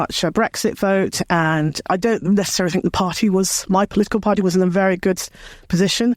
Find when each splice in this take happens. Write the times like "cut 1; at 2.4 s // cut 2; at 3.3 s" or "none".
cut 1; at 1.9 s